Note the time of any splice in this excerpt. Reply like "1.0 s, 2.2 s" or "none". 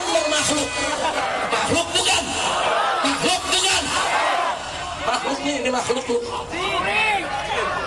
none